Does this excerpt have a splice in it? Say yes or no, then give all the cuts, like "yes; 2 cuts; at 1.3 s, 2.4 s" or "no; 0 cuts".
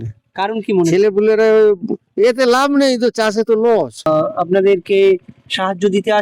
yes; 1 cut; at 3.9 s